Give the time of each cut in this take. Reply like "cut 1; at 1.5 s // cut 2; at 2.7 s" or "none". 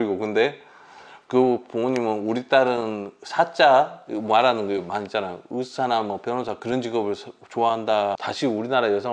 cut 1; at 8.2 s